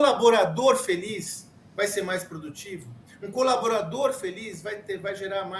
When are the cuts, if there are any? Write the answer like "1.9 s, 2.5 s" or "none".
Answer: none